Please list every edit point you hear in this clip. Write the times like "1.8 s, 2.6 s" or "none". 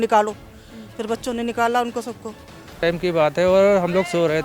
2.8 s